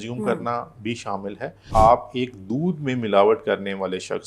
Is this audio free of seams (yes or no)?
no